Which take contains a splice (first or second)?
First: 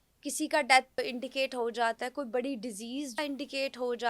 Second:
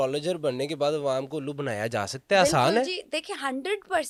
first